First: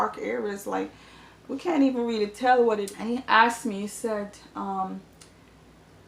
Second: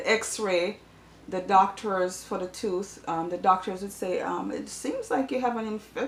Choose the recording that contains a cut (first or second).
first